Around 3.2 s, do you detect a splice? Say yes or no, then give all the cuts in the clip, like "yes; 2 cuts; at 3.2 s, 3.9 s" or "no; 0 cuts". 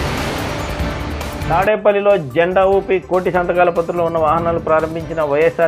no; 1 cut; at 1.4 s